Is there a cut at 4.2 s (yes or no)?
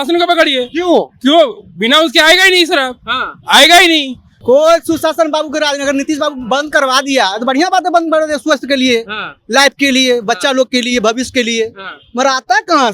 yes